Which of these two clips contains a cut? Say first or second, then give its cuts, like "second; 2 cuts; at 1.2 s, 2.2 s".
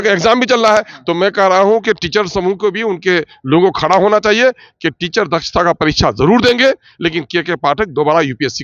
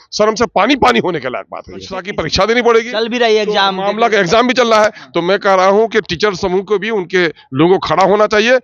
second; 1 cut; at 2.1 s